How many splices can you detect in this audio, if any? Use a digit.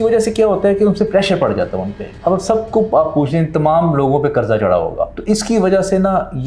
2